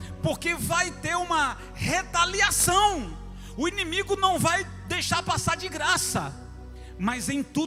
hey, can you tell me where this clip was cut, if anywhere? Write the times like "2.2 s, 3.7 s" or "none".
none